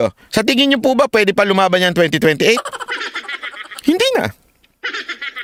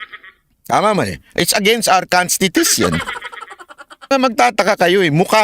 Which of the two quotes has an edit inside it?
second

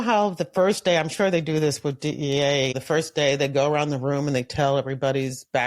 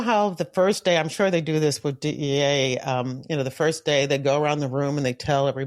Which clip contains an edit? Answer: first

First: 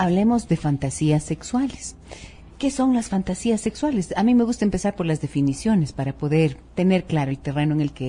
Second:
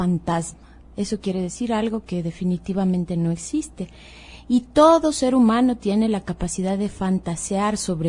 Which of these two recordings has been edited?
second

